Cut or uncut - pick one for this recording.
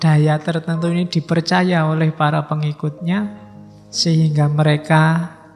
uncut